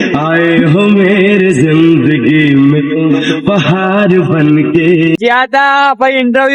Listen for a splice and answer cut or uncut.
cut